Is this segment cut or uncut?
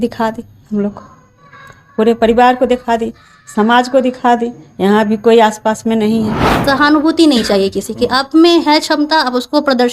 cut